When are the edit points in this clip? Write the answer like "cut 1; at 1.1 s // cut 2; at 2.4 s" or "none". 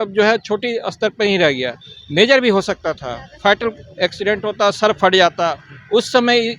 none